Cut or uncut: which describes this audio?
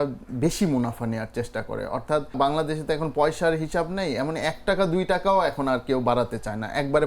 cut